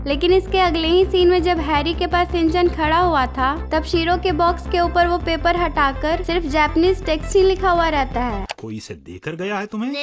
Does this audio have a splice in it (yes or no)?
yes